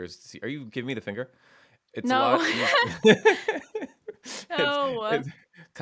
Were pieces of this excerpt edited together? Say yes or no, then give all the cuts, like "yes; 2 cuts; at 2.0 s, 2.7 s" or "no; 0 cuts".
no; 0 cuts